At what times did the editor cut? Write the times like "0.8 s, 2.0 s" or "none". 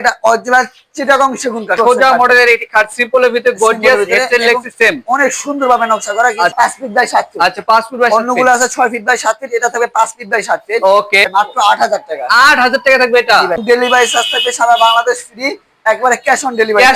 1.8 s, 6.5 s, 11.3 s, 13.6 s